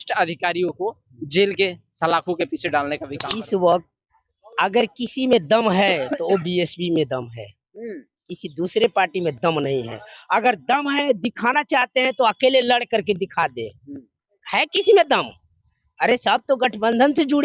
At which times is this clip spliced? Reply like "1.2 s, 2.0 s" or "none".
3.2 s